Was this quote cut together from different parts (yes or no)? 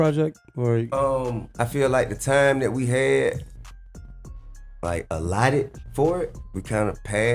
no